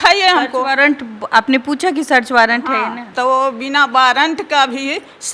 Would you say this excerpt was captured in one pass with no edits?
no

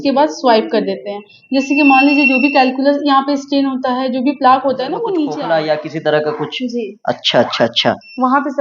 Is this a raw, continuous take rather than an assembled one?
no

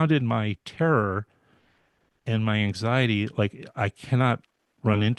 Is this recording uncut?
yes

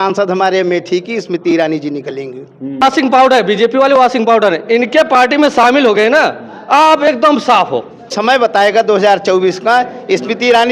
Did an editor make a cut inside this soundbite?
yes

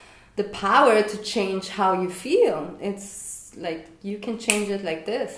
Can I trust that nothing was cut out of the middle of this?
yes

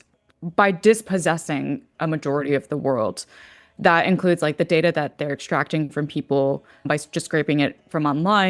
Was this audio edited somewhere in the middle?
no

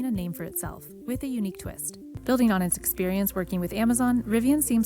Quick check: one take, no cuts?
no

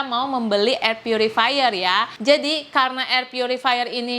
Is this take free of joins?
no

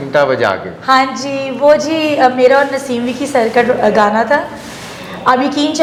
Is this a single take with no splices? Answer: yes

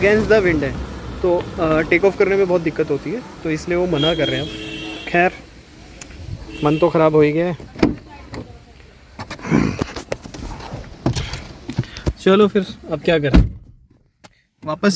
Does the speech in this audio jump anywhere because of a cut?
no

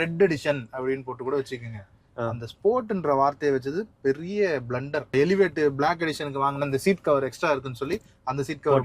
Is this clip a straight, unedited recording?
no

